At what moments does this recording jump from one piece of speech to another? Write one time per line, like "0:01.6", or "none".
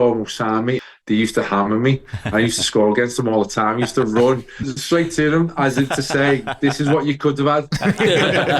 0:00.8
0:04.7